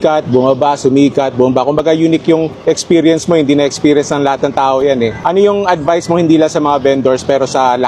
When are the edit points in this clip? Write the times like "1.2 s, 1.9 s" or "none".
2.5 s, 5.2 s